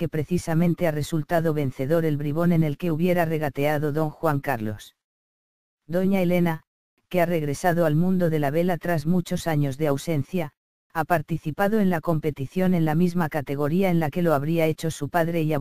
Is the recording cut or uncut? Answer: uncut